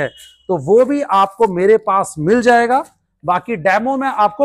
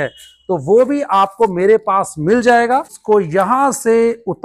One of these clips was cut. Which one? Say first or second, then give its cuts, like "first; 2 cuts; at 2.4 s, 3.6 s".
second; 1 cut; at 2.9 s